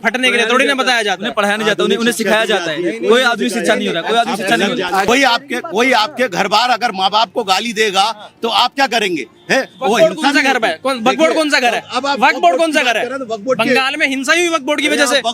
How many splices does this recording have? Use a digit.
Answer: 1